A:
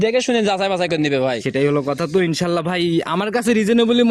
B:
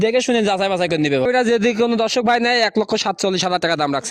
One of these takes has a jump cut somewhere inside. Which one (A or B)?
B